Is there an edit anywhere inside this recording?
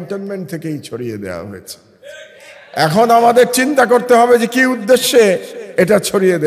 no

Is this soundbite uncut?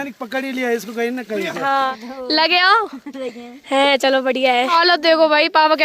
no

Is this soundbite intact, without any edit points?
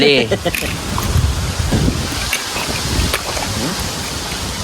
no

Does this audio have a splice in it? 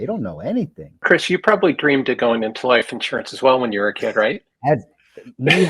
yes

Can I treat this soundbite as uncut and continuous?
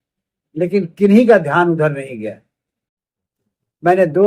yes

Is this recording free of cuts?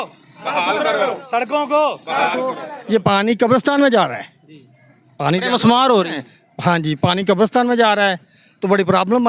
no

